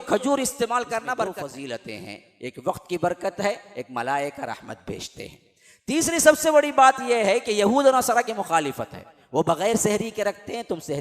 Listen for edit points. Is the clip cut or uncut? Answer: cut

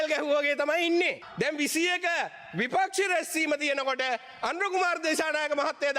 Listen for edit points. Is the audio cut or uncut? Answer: cut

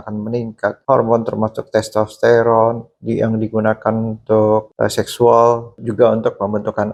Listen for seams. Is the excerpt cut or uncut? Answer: uncut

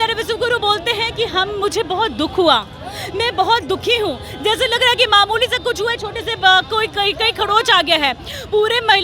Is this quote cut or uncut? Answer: uncut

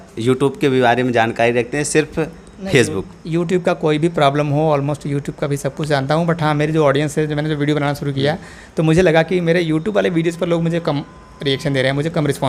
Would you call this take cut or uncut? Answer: uncut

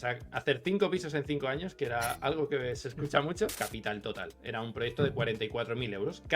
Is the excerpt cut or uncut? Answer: cut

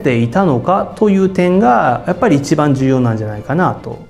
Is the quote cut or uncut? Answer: uncut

